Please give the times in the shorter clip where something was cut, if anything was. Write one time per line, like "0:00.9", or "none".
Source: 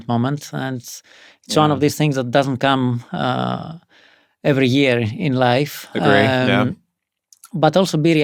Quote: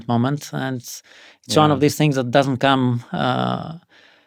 none